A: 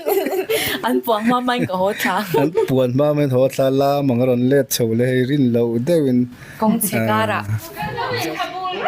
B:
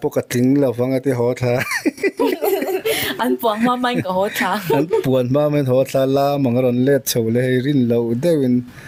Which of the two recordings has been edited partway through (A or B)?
A